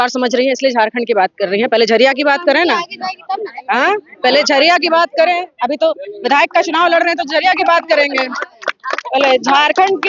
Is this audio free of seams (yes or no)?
yes